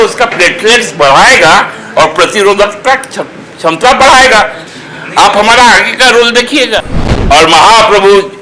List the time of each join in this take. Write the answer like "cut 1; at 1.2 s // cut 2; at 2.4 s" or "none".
cut 1; at 7.0 s